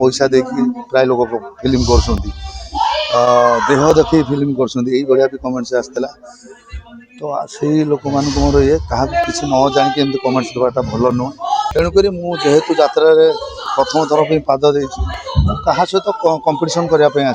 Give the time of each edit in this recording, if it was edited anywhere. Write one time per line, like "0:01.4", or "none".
0:11.7